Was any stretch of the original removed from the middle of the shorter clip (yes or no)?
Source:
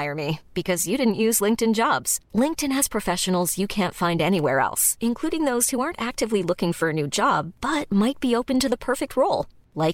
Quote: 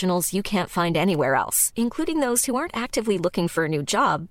no